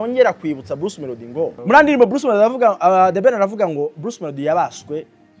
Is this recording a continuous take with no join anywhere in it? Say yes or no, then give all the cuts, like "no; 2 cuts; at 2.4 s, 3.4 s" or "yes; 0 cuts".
no; 1 cut; at 1.6 s